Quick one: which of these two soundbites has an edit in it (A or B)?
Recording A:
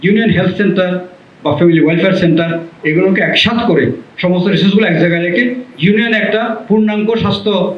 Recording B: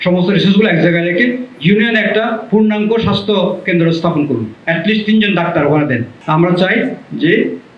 B